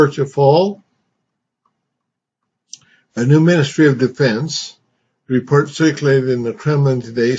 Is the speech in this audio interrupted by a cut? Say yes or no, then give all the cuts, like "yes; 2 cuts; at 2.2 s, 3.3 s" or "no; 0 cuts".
yes; 1 cut; at 4.1 s